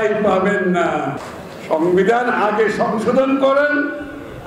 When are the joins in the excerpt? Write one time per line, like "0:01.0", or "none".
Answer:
0:01.2